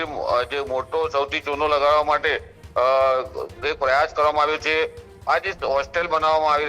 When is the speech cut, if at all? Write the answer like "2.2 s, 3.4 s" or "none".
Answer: none